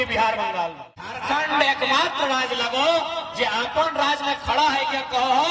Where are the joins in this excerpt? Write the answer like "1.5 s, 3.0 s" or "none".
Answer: 1.2 s